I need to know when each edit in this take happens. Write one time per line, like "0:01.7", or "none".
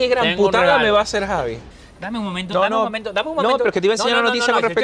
0:01.6